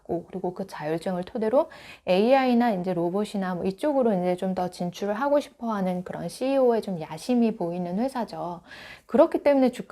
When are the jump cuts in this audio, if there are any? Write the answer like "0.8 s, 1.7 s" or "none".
none